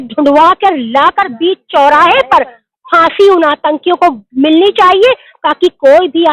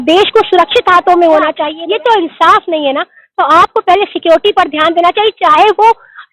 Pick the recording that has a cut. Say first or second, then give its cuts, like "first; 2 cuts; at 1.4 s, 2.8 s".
second; 1 cut; at 1.7 s